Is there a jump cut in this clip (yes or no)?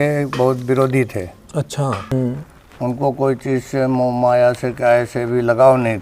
yes